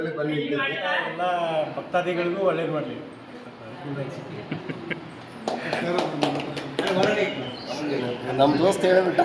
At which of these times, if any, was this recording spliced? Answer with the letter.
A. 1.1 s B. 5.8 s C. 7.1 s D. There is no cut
A